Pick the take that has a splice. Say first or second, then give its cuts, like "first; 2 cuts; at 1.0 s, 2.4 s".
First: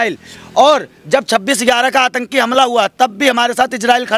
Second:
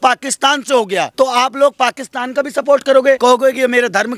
second; 2 cuts; at 1.1 s, 3.2 s